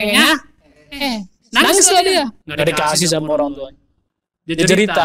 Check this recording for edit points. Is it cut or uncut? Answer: cut